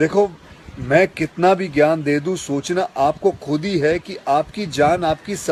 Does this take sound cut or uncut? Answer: uncut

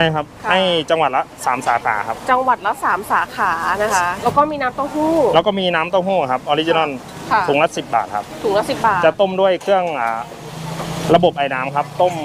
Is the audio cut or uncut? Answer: cut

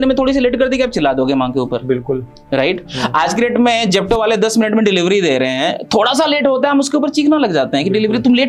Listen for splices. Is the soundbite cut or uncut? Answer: uncut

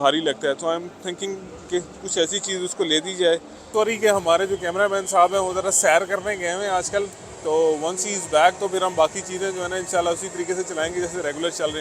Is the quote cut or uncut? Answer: cut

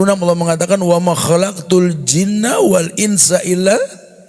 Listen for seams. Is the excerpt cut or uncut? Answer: uncut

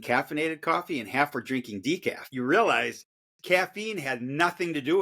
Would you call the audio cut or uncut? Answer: cut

